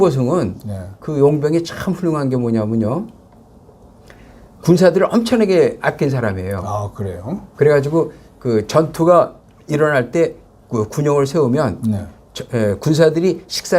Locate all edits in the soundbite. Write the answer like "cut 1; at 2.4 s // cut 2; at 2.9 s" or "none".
none